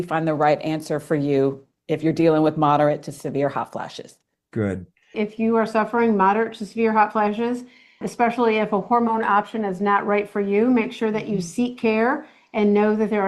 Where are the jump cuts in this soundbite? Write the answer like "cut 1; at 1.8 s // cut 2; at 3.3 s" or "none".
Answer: cut 1; at 5.1 s